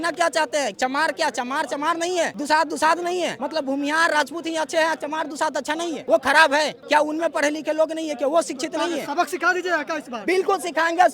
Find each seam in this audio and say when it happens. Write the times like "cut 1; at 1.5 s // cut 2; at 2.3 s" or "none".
cut 1; at 2.4 s // cut 2; at 3.4 s // cut 3; at 6.0 s // cut 4; at 6.8 s